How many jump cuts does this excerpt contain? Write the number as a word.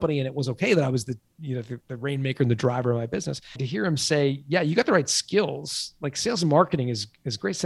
one